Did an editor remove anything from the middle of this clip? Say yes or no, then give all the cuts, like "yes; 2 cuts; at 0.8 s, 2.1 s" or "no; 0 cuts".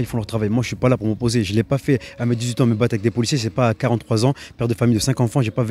no; 0 cuts